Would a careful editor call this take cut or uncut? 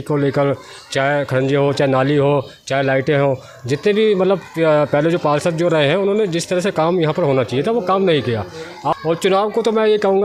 uncut